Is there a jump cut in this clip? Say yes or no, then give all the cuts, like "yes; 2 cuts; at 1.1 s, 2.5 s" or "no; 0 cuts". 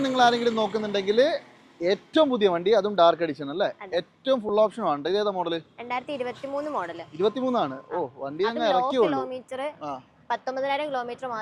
no; 0 cuts